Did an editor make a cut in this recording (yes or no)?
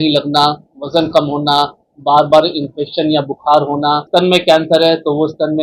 yes